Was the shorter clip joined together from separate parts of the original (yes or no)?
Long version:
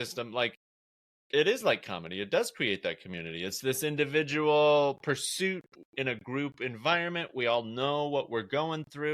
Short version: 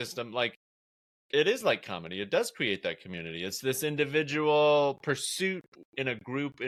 no